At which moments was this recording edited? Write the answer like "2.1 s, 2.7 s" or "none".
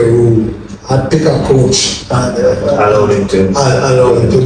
none